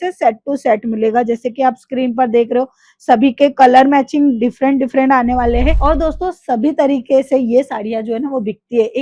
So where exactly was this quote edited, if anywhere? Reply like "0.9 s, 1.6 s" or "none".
5.8 s